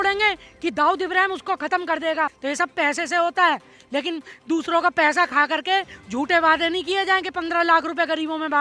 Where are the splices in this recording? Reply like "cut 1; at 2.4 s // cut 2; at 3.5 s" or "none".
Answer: cut 1; at 2.4 s